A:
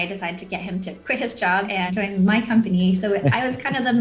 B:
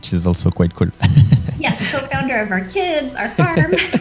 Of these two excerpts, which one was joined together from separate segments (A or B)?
A